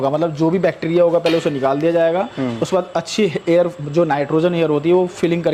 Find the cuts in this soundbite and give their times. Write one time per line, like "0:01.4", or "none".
none